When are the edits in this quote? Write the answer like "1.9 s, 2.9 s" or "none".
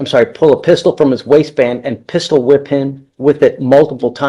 none